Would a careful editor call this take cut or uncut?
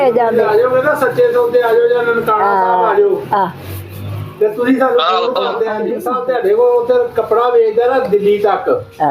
cut